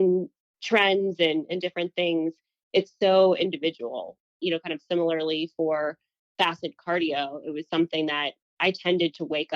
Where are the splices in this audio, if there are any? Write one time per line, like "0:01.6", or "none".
0:04.3
0:08.4